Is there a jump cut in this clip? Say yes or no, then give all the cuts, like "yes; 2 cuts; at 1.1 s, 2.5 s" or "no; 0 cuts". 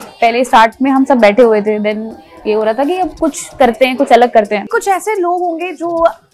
yes; 1 cut; at 4.7 s